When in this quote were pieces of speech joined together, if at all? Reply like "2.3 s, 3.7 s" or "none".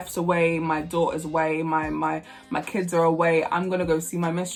none